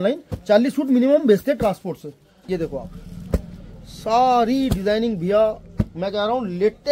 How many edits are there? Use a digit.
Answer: 1